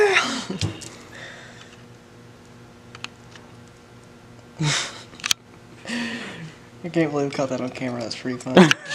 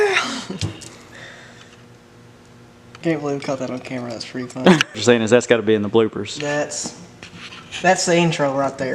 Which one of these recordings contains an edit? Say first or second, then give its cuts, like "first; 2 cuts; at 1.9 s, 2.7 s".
second; 2 cuts; at 3.0 s, 5.0 s